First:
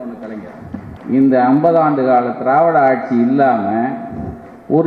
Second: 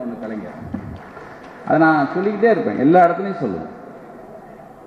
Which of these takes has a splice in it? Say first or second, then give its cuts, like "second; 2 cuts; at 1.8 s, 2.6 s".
first; 1 cut; at 0.9 s